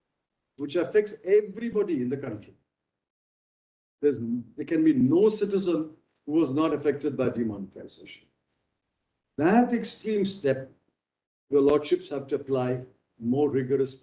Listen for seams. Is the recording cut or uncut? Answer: uncut